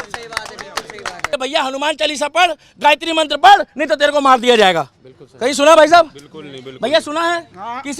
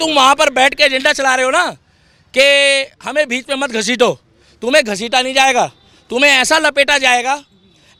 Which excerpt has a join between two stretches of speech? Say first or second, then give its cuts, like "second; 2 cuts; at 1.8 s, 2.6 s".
first; 1 cut; at 1.2 s